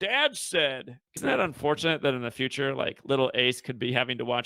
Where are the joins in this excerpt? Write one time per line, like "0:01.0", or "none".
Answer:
0:01.2